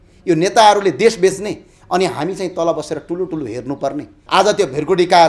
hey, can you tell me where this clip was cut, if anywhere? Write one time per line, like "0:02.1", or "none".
0:04.1

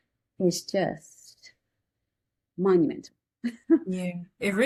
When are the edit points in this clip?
none

